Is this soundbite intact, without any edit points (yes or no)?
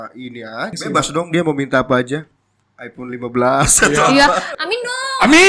no